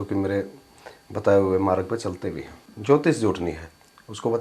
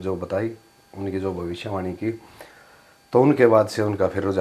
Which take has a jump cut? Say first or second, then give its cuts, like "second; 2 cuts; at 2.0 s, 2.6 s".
first; 1 cut; at 2.6 s